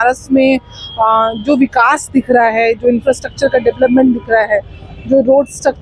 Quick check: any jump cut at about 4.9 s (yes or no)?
no